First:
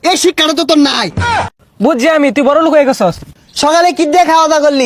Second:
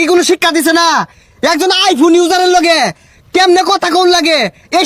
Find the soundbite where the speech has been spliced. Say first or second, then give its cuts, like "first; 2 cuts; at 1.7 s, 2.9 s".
first; 2 cuts; at 1.5 s, 3.2 s